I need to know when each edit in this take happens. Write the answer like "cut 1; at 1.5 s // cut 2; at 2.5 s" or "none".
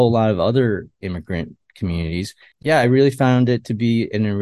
cut 1; at 2.5 s